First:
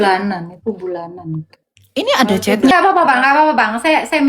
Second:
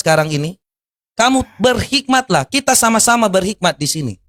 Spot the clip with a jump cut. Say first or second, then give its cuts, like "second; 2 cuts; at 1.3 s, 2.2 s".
first; 1 cut; at 2.7 s